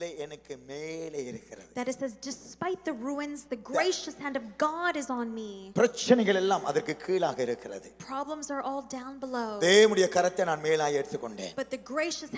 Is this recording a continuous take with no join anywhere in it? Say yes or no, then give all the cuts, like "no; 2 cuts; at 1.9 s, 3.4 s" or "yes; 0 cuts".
yes; 0 cuts